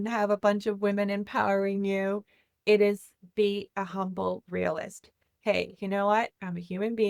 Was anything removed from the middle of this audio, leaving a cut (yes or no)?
no